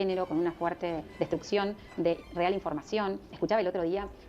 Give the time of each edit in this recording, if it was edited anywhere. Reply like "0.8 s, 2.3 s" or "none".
3.3 s